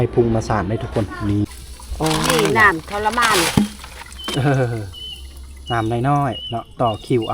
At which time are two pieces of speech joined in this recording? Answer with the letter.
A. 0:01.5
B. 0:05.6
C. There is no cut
A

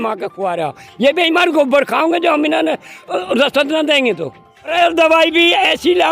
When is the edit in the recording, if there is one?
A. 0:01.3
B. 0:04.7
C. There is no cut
B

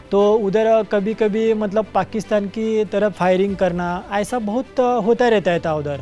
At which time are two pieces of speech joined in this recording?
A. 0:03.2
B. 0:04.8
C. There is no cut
A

